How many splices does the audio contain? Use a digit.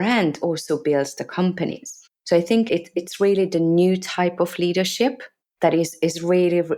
0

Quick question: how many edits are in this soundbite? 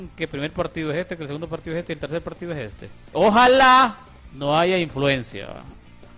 1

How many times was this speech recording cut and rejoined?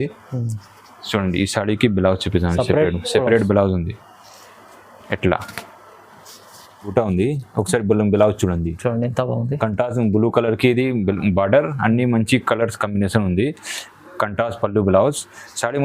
1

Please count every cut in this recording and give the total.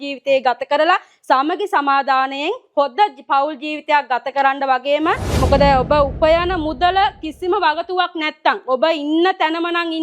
1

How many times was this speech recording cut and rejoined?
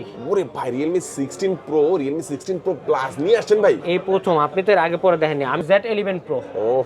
1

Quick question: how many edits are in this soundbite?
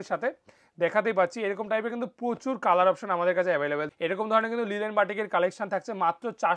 1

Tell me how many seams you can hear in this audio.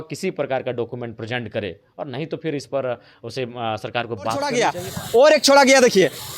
1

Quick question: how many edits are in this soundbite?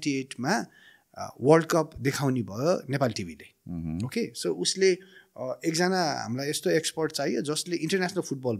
0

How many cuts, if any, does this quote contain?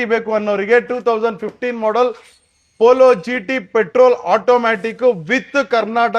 0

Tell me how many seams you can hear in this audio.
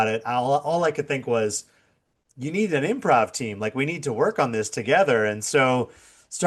0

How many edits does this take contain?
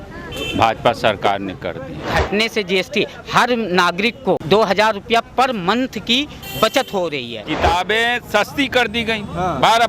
3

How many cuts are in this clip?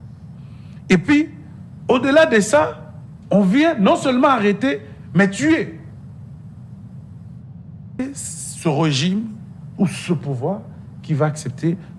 1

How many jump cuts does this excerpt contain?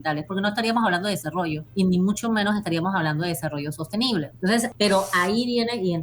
2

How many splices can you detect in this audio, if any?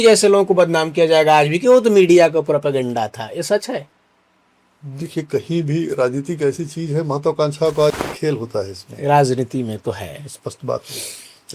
1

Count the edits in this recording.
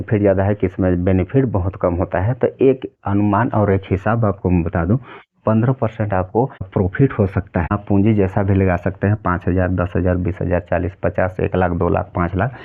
2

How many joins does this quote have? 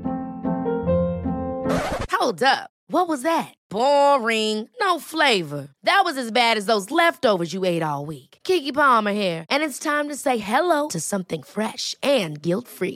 0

